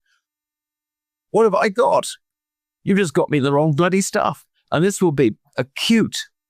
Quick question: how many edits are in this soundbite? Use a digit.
0